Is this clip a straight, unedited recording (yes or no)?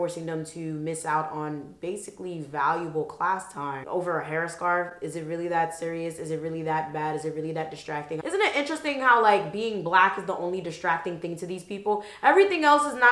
yes